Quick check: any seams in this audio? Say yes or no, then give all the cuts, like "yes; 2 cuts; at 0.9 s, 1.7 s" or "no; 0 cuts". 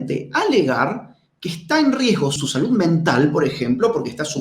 yes; 1 cut; at 2.4 s